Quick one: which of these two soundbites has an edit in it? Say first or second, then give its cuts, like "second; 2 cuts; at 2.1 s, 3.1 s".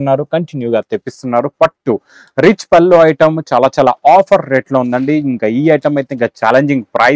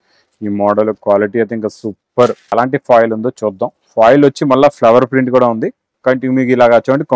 second; 1 cut; at 2.5 s